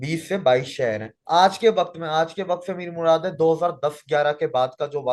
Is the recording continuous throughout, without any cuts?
no; 1 cut; at 1.1 s

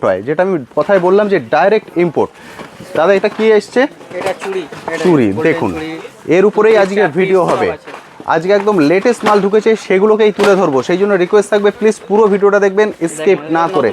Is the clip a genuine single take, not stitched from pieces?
yes; 0 cuts

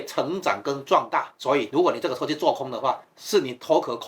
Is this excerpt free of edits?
no; 1 cut; at 1.3 s

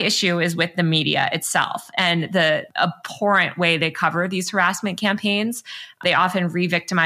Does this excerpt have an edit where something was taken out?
yes; 2 cuts; at 2.7 s, 6.0 s

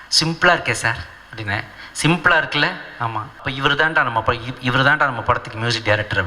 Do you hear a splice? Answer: yes; 1 cut; at 3.5 s

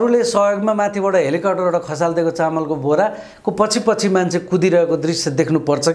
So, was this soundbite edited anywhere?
no; 0 cuts

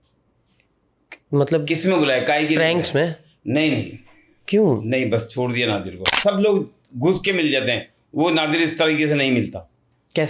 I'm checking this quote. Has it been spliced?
yes; 1 cut; at 6.1 s

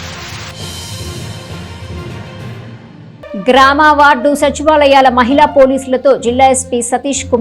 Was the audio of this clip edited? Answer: no; 0 cuts

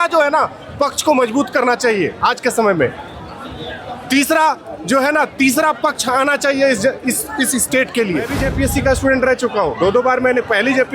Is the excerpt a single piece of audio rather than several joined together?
no; 1 cut; at 8.4 s

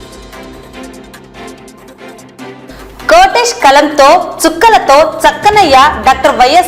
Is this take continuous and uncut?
no; 1 cut; at 1.4 s

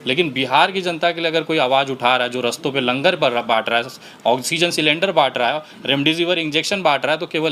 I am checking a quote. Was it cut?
no; 0 cuts

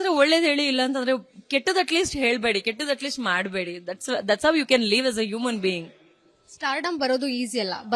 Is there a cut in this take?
no; 0 cuts

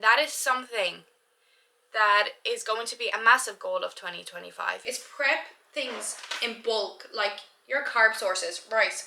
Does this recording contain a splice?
yes; 1 cut; at 4.8 s

